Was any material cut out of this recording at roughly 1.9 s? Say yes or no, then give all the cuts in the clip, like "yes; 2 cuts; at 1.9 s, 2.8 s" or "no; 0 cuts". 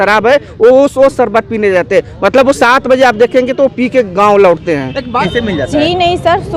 no; 1 cut; at 5.3 s